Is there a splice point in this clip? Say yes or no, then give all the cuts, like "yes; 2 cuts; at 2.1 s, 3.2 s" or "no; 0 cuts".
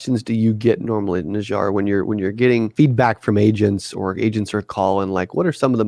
yes; 1 cut; at 2.7 s